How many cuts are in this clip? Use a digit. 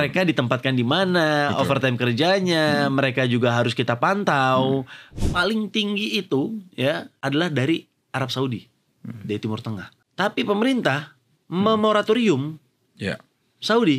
3